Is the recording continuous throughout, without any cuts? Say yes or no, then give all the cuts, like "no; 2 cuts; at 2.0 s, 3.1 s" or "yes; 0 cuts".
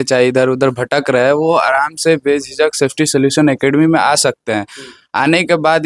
yes; 0 cuts